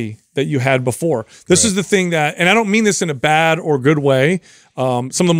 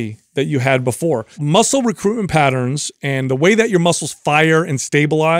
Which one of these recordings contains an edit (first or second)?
second